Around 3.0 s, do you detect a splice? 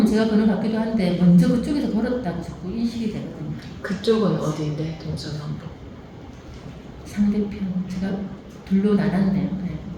no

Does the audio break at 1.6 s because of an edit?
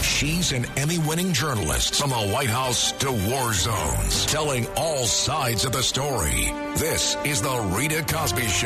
no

